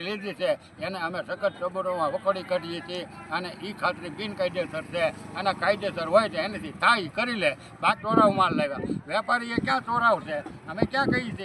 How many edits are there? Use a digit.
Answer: 1